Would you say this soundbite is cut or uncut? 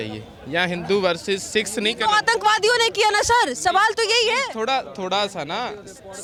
uncut